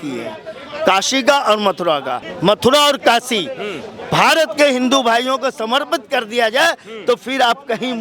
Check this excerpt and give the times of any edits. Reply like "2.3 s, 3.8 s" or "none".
2.2 s